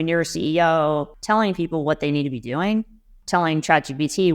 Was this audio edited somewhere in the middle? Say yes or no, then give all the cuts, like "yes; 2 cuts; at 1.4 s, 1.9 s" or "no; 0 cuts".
yes; 2 cuts; at 1.1 s, 3.2 s